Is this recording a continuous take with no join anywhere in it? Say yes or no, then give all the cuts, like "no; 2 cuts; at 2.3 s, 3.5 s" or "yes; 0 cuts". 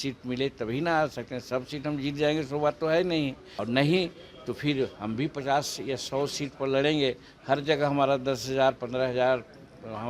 no; 1 cut; at 3.5 s